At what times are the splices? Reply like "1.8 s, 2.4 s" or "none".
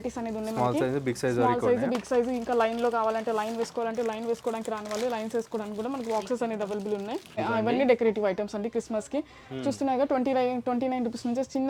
7.3 s